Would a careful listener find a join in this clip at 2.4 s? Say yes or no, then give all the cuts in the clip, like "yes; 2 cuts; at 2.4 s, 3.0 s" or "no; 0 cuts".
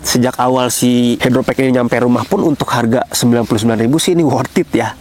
no; 0 cuts